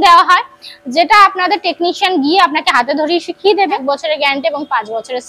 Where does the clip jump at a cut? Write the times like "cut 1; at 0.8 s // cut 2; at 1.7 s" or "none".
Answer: cut 1; at 3.8 s